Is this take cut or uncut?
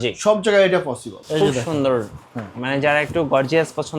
cut